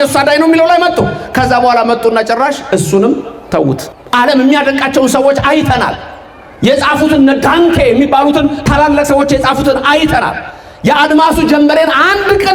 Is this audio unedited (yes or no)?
no